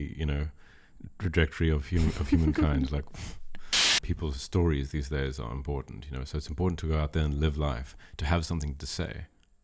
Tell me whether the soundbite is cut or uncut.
cut